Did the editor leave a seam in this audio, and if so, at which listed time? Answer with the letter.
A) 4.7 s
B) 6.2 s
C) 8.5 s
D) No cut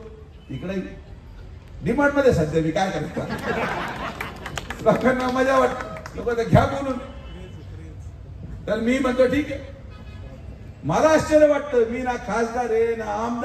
D